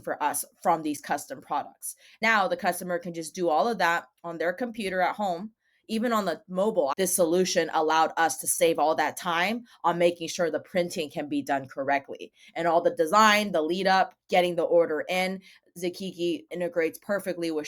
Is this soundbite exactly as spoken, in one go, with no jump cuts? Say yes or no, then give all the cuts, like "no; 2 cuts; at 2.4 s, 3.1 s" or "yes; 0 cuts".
no; 2 cuts; at 2.2 s, 6.9 s